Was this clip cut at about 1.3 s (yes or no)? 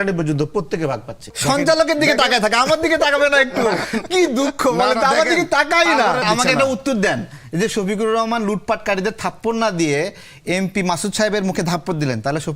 yes